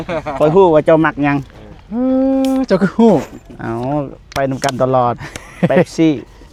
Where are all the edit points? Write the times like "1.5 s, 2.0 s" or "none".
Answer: none